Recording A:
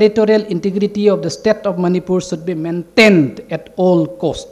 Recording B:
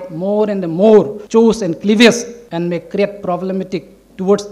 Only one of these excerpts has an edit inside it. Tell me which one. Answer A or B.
B